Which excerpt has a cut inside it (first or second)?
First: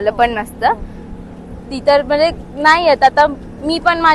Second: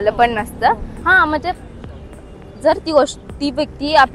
second